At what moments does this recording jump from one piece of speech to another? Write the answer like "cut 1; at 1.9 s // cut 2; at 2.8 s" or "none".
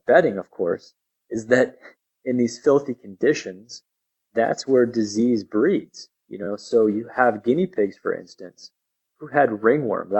none